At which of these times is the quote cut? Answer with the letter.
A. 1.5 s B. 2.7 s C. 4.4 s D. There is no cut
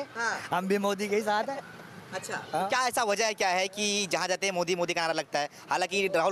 D